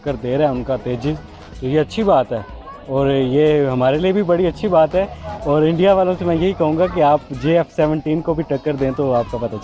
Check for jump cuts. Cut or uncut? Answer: uncut